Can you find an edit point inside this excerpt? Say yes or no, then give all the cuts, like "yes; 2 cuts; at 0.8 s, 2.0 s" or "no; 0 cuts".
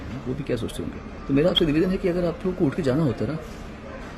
yes; 1 cut; at 1.1 s